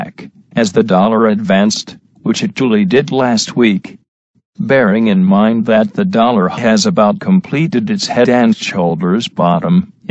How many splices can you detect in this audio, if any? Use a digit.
1